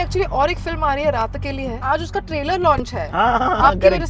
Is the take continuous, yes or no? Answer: no